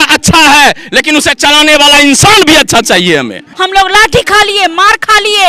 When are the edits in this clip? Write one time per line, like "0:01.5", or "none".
0:03.4